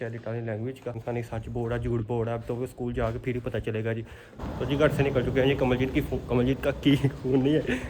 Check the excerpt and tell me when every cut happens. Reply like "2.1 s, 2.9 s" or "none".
1.0 s, 4.4 s